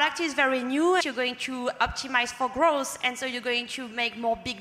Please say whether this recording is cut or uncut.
cut